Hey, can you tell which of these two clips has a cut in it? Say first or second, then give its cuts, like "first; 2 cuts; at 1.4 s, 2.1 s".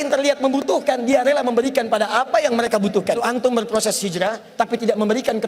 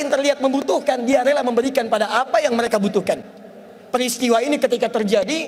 first; 1 cut; at 3.2 s